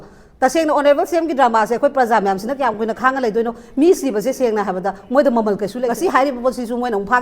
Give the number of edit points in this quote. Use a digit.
1